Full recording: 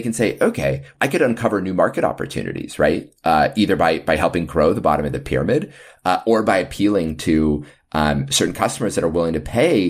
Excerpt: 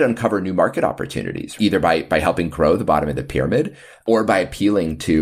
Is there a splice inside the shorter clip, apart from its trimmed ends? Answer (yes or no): yes